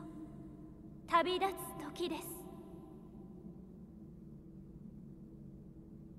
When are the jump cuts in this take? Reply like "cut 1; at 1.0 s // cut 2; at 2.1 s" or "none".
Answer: cut 1; at 2.4 s // cut 2; at 5.3 s